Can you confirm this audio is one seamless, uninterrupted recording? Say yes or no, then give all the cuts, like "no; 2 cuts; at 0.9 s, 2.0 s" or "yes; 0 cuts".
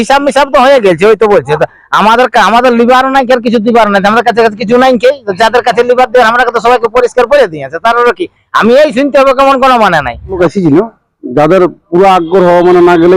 no; 1 cut; at 10.4 s